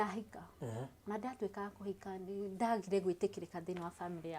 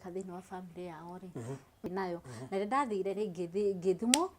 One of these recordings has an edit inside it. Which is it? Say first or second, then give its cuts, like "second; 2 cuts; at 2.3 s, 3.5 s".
second; 1 cut; at 1.9 s